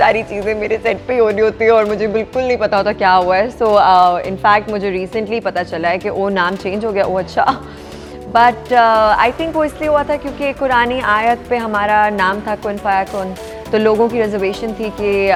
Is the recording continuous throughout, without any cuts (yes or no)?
yes